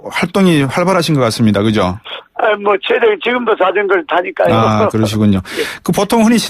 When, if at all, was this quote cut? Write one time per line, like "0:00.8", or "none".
0:05.3